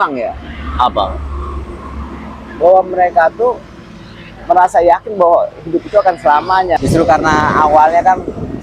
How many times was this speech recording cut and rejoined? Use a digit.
1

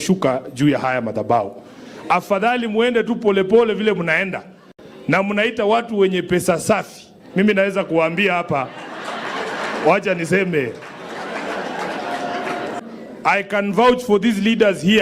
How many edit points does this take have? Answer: 1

